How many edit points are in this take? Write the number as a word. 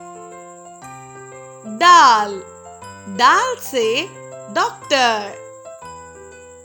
one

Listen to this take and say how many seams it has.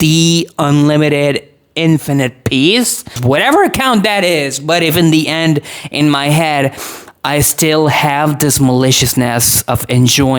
one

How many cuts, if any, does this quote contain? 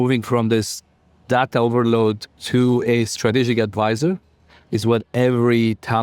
one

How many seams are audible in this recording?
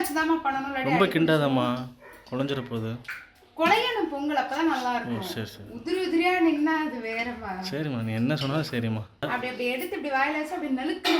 one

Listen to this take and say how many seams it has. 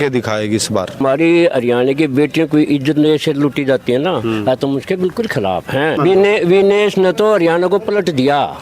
two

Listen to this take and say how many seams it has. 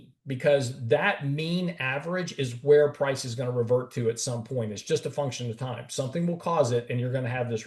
zero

